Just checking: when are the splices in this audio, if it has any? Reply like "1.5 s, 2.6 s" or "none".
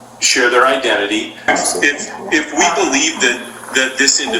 1.5 s